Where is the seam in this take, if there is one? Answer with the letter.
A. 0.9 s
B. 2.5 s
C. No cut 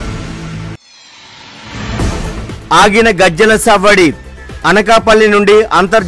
B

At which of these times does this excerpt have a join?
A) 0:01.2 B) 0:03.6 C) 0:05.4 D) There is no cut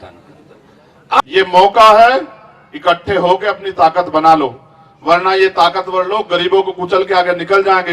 A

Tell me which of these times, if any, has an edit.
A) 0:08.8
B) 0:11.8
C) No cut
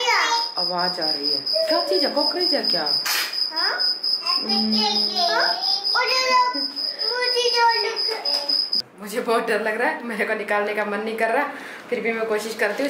A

